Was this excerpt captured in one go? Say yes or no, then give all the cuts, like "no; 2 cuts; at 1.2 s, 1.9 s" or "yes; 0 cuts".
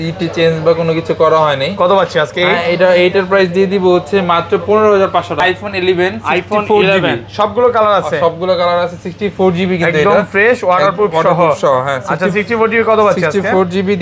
no; 1 cut; at 5.4 s